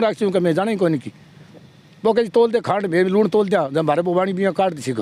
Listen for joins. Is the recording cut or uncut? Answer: uncut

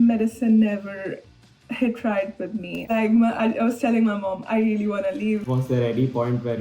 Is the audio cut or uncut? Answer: cut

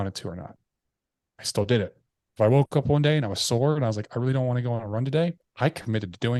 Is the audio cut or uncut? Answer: uncut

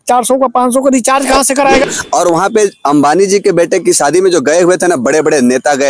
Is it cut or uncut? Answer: cut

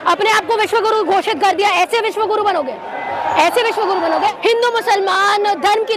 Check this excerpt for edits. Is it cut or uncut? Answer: cut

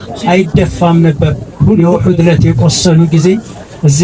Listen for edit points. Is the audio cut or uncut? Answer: cut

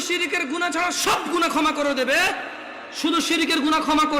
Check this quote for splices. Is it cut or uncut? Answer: uncut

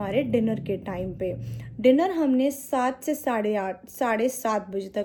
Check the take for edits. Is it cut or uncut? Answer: uncut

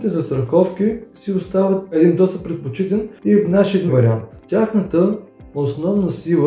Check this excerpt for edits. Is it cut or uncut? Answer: cut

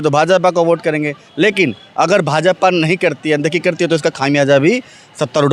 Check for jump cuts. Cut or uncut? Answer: uncut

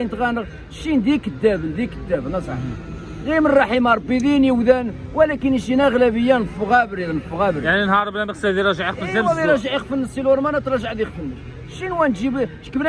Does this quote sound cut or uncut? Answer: uncut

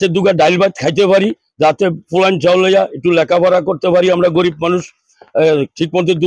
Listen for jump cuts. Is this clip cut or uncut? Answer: uncut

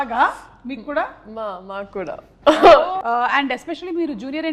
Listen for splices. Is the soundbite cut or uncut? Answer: cut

